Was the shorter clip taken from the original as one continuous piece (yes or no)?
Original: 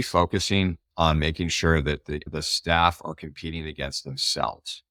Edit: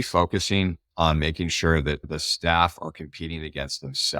no